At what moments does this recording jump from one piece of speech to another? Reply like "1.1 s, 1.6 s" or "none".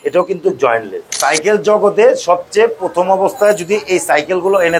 1.0 s